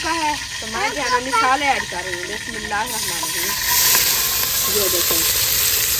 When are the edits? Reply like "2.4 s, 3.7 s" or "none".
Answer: none